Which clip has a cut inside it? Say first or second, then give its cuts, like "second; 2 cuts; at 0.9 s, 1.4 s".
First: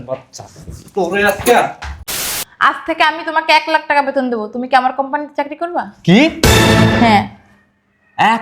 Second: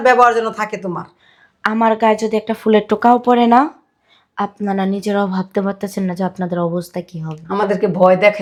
first; 1 cut; at 2.1 s